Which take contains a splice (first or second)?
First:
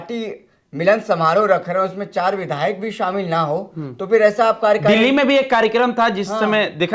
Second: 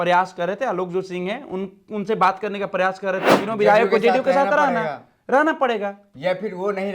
second